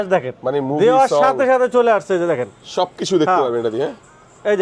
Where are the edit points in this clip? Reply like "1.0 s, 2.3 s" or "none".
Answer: none